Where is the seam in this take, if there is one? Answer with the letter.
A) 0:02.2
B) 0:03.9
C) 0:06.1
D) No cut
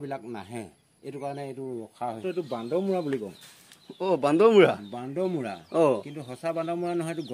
A